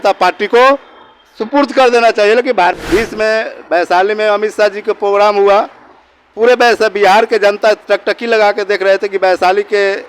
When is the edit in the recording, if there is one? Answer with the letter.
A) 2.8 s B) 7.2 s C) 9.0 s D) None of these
A